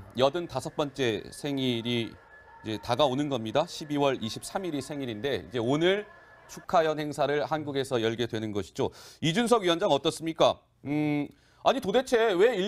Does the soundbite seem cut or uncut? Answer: cut